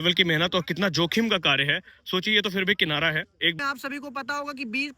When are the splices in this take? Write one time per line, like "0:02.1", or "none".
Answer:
0:03.6